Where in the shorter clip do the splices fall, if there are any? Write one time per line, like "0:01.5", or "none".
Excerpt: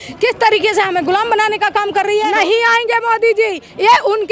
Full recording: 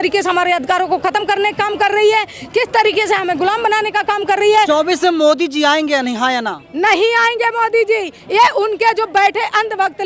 0:02.3